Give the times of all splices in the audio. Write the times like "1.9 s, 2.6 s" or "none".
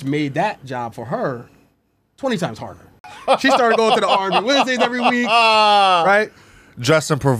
3.0 s